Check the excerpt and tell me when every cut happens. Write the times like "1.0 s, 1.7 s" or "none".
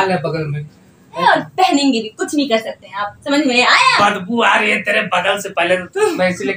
1.2 s